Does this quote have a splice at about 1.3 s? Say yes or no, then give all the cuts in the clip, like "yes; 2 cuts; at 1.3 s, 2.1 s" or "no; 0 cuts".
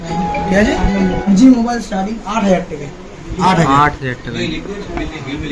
yes; 1 cut; at 1.3 s